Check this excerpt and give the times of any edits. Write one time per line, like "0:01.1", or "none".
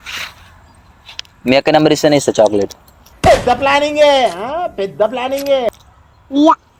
none